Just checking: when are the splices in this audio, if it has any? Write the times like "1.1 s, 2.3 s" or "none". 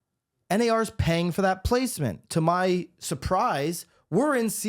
2.2 s